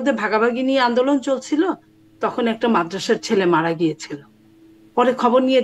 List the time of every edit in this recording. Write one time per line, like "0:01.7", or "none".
none

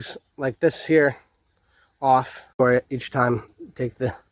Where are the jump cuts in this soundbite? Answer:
0:02.6

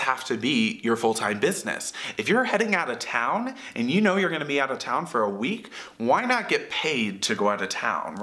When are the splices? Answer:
none

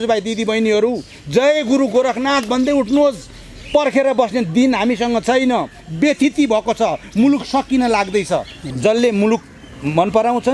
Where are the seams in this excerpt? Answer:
0:08.7

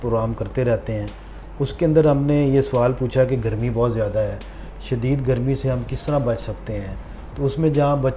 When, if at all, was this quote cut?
none

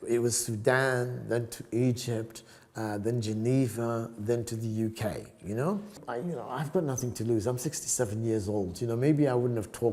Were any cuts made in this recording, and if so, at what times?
0:06.0

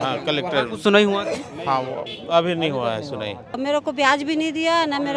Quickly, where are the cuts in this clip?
0:03.5

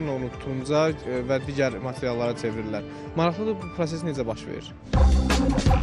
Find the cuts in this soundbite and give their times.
0:04.8

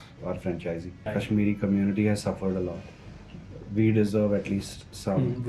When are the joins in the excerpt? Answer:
0:01.1

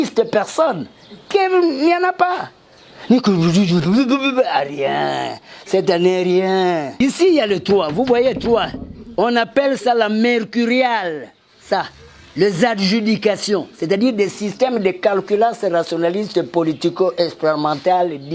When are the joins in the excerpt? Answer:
0:07.0

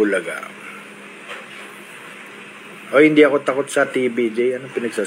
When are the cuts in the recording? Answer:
none

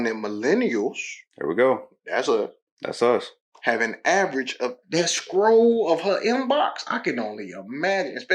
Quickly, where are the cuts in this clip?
0:04.8

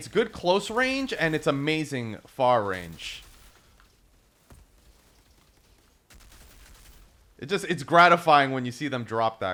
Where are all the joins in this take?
none

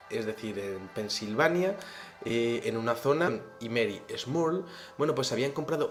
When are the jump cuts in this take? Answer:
none

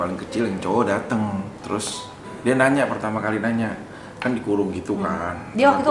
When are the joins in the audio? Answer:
none

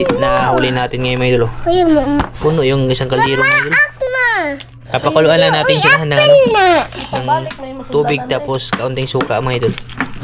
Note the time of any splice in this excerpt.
none

